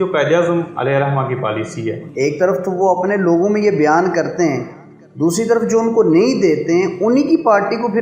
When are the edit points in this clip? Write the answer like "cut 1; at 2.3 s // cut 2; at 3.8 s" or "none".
cut 1; at 2.0 s